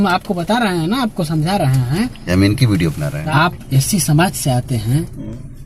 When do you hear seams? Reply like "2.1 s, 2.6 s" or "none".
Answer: 3.1 s